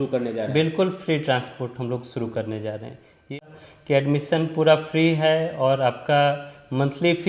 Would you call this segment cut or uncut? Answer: cut